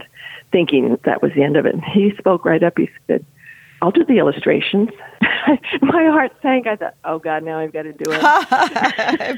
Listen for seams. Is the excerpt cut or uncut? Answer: cut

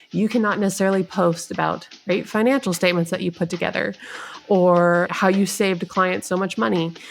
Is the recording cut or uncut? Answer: cut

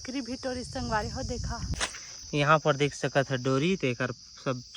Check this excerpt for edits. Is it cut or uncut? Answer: cut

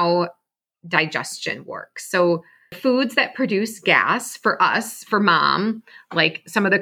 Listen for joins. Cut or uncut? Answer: cut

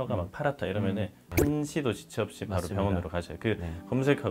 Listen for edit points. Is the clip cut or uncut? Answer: uncut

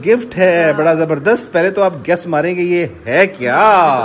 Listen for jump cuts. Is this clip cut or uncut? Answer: uncut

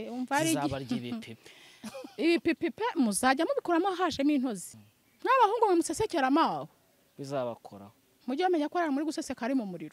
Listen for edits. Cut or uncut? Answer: cut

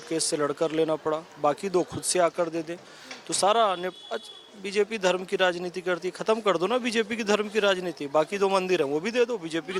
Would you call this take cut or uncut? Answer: uncut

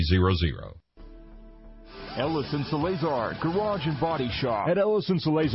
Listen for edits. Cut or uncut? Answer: cut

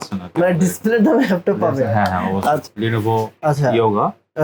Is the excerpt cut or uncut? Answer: cut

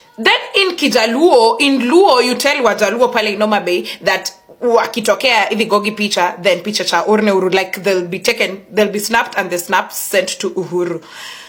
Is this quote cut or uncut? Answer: uncut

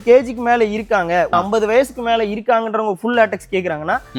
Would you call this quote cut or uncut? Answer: cut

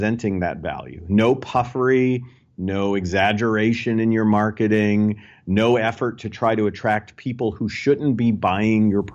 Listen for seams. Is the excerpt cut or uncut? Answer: uncut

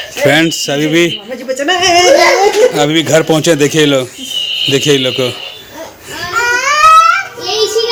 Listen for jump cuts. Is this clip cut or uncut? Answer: uncut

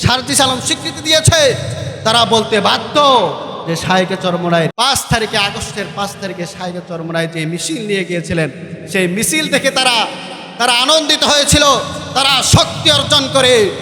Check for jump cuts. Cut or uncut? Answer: cut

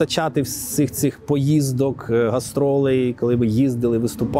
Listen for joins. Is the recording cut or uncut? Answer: uncut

